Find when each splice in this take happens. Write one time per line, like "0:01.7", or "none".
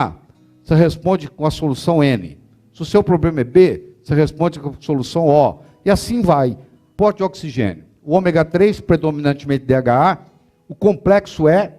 0:06.9

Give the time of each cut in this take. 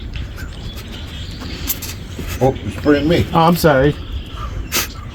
none

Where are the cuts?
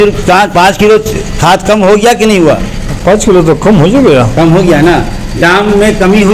none

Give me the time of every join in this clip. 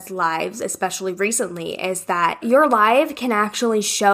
0:02.4

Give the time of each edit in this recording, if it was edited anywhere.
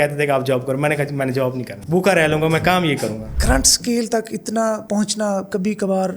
0:03.3

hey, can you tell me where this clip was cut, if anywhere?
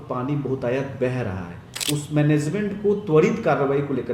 0:01.7

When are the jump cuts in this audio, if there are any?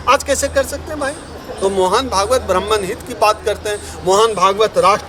none

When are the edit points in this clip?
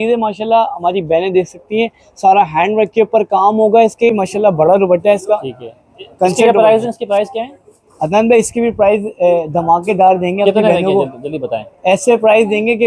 0:04.1

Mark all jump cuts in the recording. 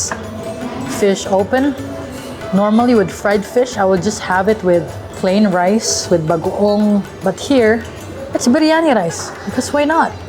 none

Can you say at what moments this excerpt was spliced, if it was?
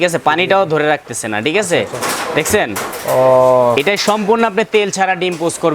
none

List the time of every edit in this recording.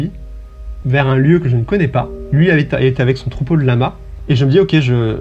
0:02.2
0:04.1

